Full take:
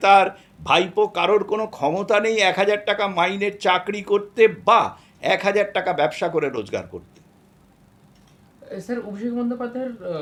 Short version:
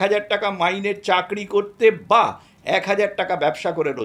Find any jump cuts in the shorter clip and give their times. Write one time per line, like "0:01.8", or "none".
none